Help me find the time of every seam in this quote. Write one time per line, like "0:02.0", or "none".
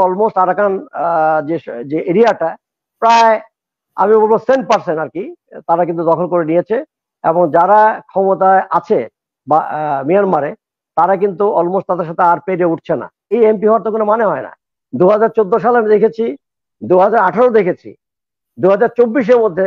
0:13.3